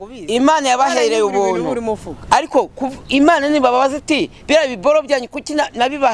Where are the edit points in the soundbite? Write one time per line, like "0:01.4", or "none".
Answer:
none